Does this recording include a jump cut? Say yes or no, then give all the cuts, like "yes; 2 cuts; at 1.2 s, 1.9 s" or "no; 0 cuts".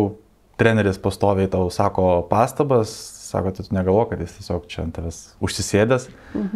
no; 0 cuts